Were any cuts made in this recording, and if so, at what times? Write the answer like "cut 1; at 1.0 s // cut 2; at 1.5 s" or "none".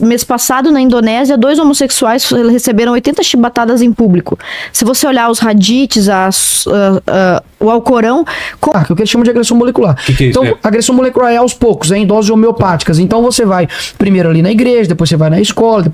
cut 1; at 8.7 s